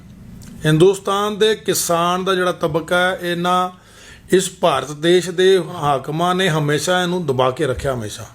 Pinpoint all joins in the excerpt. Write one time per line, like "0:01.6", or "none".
0:05.8